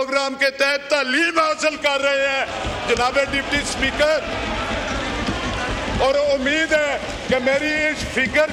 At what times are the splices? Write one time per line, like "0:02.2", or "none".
none

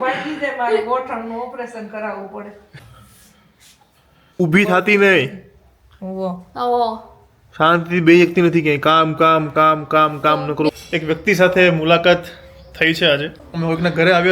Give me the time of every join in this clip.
0:02.8
0:04.4
0:10.7
0:13.4

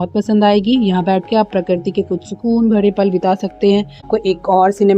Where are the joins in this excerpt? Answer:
0:04.1

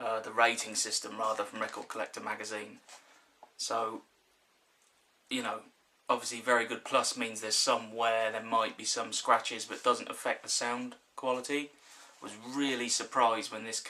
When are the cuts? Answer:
none

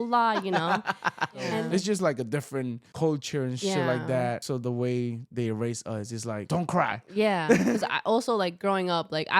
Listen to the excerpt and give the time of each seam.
0:01.6
0:02.8
0:04.4
0:06.4
0:07.8

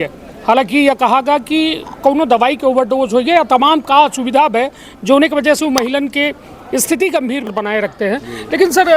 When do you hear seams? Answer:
0:07.5

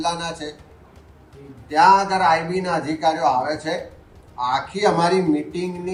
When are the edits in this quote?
none

